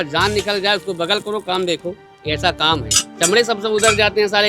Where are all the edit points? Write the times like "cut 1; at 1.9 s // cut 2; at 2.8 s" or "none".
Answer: none